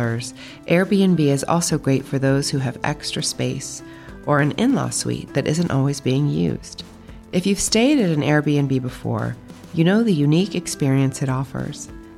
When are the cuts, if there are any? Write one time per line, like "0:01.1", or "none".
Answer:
none